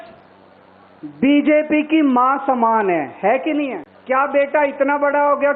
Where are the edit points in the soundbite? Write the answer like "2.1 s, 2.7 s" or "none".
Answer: 3.9 s